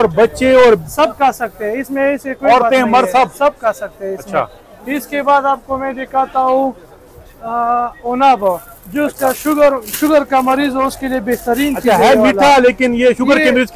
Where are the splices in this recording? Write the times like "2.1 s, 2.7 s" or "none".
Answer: none